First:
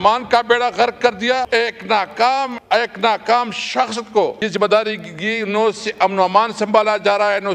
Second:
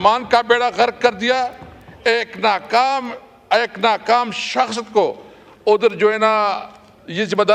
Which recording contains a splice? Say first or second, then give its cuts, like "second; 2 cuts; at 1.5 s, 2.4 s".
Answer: first; 3 cuts; at 1.5 s, 2.6 s, 4.4 s